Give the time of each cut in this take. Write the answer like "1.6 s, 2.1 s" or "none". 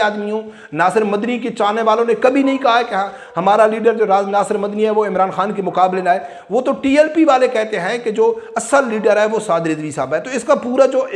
none